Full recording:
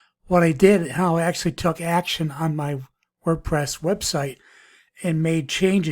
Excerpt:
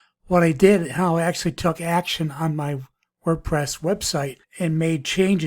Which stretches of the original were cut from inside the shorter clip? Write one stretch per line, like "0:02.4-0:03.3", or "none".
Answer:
0:04.4-0:04.9